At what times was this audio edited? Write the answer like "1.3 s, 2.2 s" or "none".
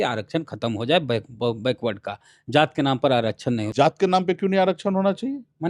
none